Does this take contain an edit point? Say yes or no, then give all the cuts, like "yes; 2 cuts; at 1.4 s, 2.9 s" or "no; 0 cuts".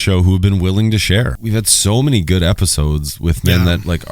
yes; 1 cut; at 1.3 s